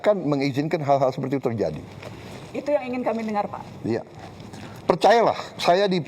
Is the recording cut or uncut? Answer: uncut